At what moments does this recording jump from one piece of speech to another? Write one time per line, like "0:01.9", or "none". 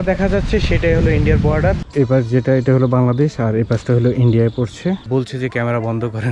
0:01.8
0:05.0